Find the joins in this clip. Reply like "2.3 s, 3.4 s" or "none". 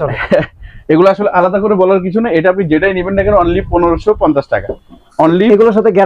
none